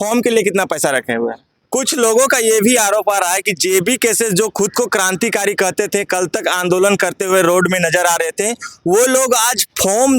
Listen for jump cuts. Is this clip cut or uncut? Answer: cut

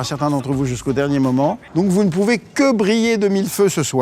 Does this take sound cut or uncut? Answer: cut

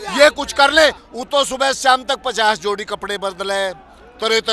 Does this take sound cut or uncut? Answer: cut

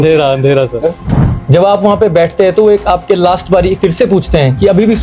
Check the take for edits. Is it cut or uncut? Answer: cut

